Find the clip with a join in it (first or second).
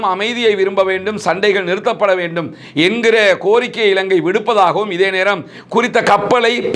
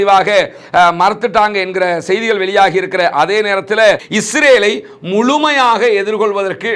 second